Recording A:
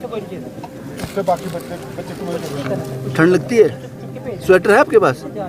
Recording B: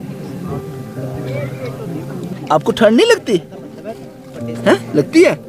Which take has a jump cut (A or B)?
B